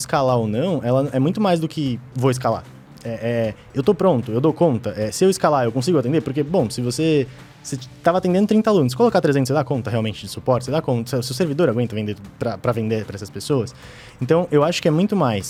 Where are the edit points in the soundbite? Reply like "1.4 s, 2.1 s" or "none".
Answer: none